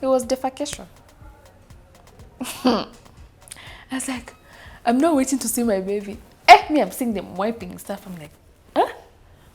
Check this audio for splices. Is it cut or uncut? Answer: uncut